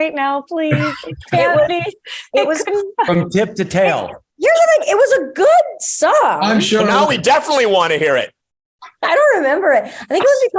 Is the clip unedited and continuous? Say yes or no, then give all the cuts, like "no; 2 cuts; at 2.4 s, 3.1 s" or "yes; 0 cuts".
yes; 0 cuts